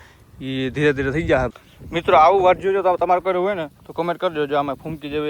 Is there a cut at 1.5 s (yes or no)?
yes